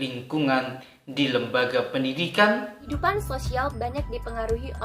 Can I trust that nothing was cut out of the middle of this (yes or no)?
no